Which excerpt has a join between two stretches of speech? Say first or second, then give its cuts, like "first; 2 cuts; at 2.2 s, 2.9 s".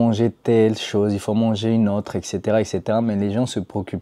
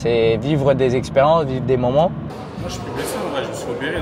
second; 1 cut; at 2.2 s